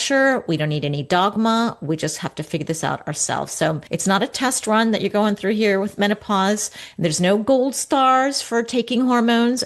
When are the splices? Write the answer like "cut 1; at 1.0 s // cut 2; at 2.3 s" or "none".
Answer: cut 1; at 3.8 s